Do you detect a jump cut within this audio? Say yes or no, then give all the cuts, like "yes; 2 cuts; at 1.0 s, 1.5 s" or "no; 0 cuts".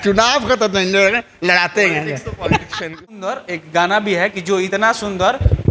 yes; 1 cut; at 3.1 s